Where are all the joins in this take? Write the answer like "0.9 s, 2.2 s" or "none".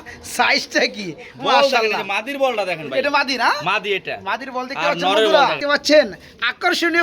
5.6 s